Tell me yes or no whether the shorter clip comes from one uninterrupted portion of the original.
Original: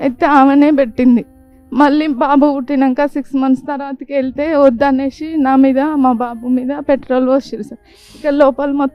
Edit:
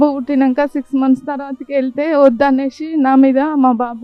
yes